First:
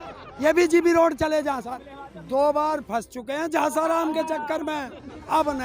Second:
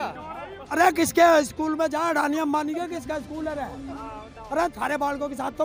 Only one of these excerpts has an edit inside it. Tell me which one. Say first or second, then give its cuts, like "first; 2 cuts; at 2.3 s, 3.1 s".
first; 1 cut; at 1.7 s